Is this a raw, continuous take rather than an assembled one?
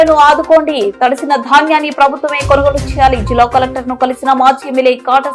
yes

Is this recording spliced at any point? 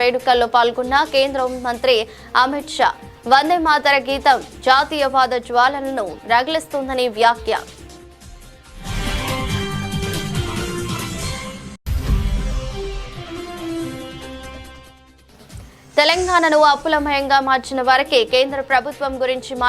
yes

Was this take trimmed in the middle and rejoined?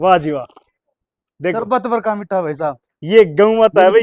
yes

